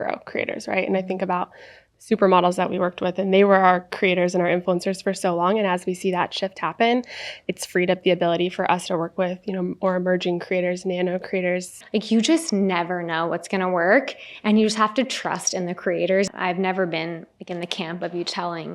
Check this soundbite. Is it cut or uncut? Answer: cut